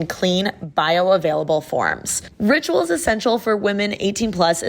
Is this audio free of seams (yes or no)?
no